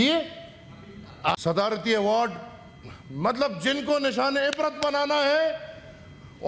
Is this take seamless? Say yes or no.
no